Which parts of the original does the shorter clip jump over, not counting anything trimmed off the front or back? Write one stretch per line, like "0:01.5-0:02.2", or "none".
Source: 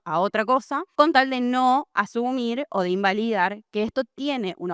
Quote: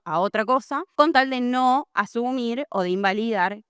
none